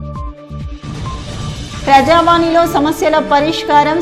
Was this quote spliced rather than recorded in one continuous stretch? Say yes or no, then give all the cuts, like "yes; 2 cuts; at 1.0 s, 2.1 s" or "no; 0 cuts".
yes; 1 cut; at 1.0 s